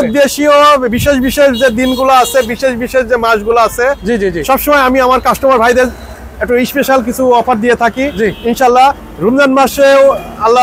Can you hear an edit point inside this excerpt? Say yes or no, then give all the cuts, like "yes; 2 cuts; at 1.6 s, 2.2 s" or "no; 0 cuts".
no; 0 cuts